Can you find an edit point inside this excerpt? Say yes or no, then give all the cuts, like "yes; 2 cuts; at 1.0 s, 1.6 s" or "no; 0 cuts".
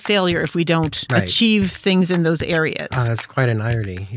yes; 1 cut; at 1.0 s